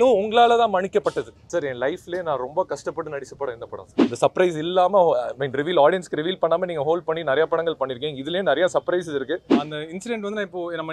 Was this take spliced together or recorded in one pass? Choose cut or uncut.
cut